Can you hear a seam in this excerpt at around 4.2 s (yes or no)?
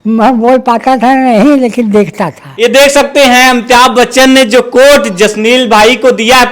no